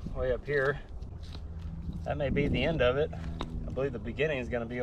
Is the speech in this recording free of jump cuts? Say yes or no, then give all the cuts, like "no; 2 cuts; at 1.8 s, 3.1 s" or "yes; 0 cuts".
no; 1 cut; at 1.0 s